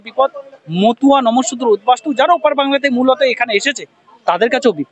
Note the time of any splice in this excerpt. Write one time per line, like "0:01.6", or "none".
none

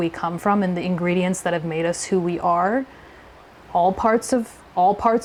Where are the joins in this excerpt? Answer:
none

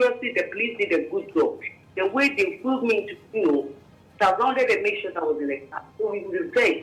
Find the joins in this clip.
none

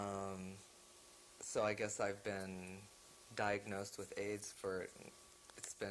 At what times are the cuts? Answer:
0:01.5

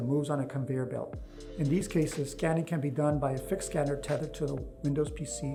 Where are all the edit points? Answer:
none

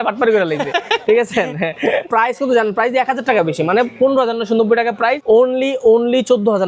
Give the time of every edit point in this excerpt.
0:02.1
0:05.2

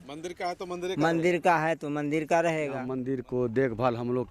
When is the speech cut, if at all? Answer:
0:02.9

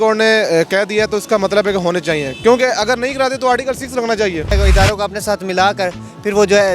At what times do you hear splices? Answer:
0:04.5

